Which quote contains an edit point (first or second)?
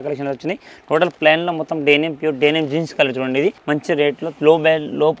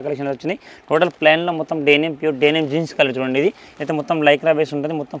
first